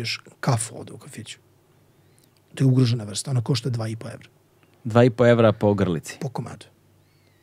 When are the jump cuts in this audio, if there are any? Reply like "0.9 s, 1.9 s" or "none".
none

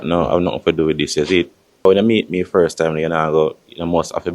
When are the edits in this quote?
1.8 s

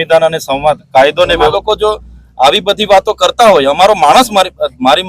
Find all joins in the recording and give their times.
1.5 s

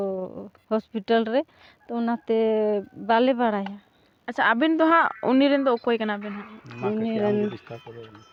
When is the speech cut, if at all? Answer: none

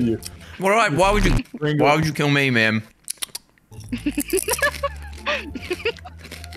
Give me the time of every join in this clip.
5.1 s

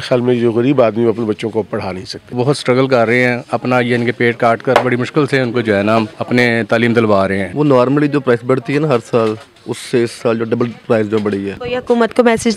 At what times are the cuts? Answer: 2.3 s, 6.2 s, 7.4 s, 11.6 s

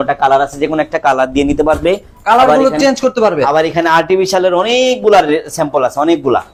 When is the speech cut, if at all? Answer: none

